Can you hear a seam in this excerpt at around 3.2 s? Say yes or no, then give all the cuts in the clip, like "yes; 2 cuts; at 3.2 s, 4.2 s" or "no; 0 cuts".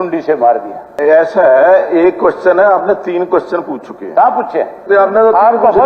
no; 2 cuts; at 0.9 s, 4.8 s